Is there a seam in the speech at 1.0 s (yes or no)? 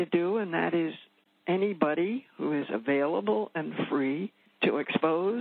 no